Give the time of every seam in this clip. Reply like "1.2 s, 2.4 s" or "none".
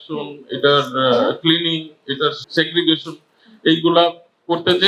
2.4 s